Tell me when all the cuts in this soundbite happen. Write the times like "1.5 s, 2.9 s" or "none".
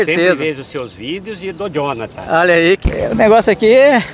2.8 s